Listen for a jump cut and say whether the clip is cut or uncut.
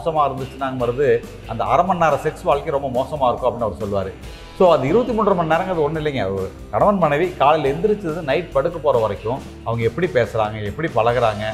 uncut